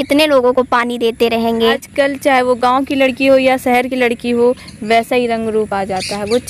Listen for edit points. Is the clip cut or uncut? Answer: cut